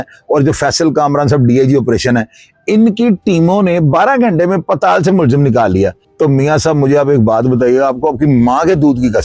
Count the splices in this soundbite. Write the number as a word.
one